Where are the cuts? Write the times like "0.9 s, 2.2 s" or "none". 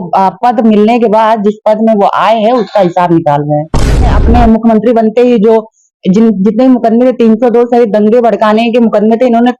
4.1 s